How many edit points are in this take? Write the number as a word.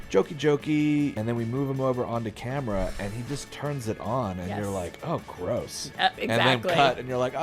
two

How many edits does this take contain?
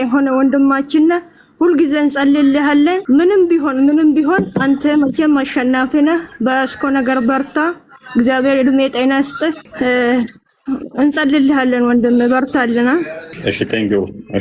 three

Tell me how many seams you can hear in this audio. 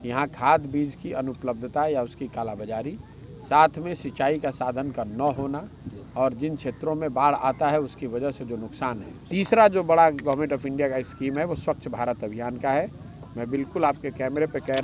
one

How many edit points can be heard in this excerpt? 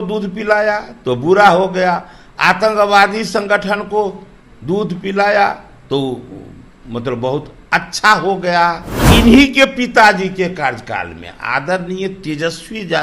one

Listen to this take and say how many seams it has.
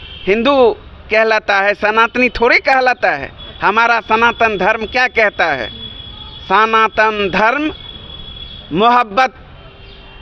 zero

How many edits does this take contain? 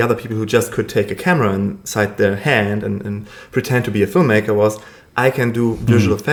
zero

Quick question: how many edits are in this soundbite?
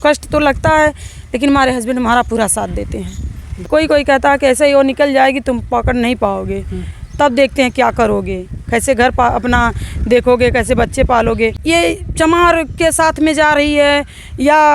two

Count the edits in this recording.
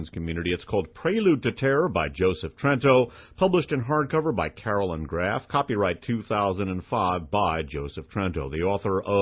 one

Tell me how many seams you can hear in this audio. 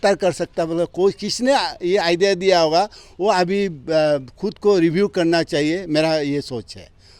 zero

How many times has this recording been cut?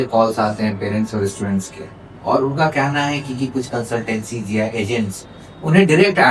zero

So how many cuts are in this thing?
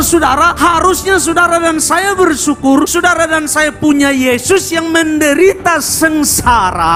zero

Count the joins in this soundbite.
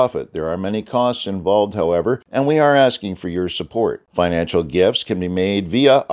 two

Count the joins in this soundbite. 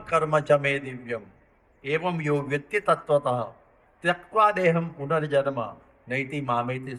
zero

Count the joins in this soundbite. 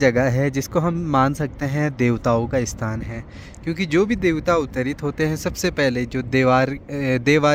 zero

